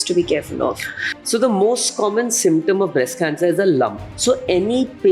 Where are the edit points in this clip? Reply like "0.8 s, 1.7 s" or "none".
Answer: 4.1 s